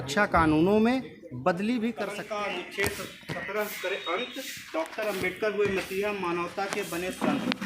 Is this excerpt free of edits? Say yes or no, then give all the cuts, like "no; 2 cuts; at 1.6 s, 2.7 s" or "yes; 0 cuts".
no; 1 cut; at 2.1 s